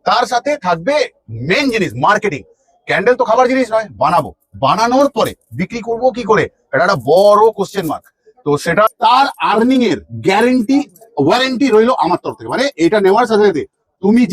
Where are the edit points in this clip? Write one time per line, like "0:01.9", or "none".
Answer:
0:08.9